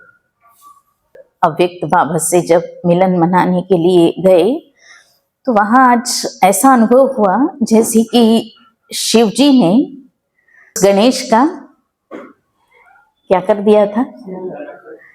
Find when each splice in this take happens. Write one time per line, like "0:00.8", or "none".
0:01.2
0:10.7